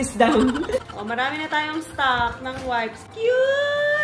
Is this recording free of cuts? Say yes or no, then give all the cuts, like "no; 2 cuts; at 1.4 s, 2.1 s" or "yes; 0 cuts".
no; 2 cuts; at 0.8 s, 3.0 s